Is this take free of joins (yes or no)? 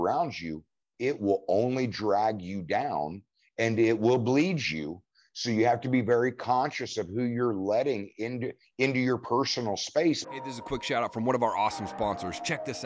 no